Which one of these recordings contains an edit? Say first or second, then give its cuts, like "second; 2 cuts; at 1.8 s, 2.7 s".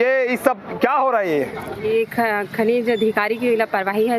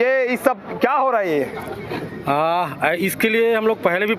first; 1 cut; at 1.7 s